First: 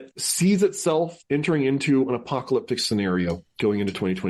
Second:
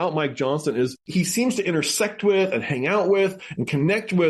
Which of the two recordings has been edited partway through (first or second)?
second